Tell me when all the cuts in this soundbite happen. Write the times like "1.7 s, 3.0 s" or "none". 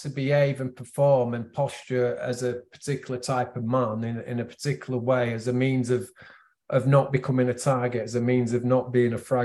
none

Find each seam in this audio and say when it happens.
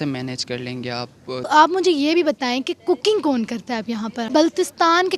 1.5 s, 4.3 s

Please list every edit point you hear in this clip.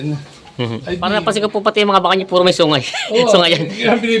1.1 s

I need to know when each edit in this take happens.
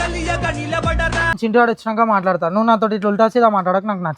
1.4 s

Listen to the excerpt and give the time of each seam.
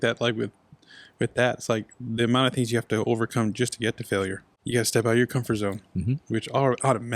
4.6 s

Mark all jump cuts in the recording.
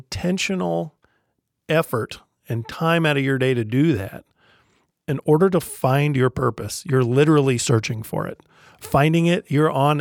4.8 s

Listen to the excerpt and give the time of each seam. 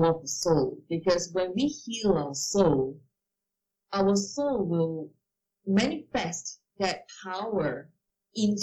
none

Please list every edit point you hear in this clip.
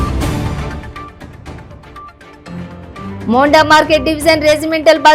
1.8 s

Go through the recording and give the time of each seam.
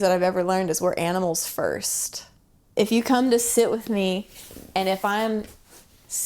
2.7 s

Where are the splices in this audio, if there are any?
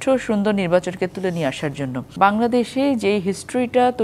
2.1 s

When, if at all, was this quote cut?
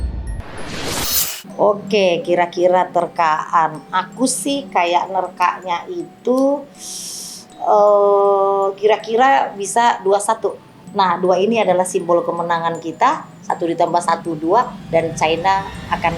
1.4 s, 10.8 s

